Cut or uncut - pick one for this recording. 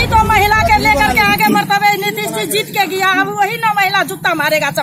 uncut